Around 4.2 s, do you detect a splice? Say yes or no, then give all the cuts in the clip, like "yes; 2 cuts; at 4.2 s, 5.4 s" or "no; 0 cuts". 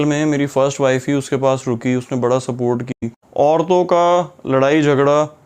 no; 1 cut; at 2.9 s